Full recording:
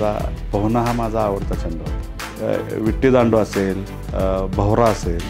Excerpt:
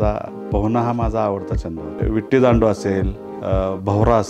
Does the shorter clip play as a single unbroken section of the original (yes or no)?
no